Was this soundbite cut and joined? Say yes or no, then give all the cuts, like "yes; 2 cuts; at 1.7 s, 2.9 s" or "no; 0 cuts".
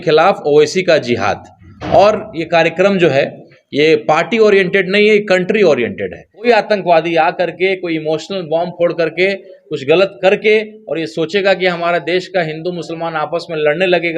yes; 1 cut; at 6.5 s